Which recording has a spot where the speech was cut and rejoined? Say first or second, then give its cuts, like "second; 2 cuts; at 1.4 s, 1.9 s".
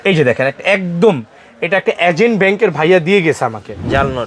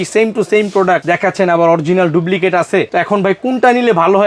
second; 2 cuts; at 1.0 s, 2.9 s